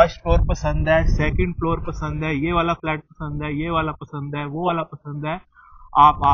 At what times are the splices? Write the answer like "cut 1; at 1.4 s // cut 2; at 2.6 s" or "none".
none